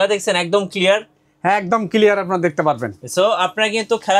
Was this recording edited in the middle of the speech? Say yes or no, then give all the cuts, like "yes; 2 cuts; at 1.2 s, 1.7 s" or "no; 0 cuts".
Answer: no; 0 cuts